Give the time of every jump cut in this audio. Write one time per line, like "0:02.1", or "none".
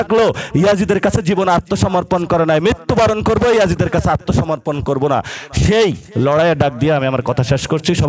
none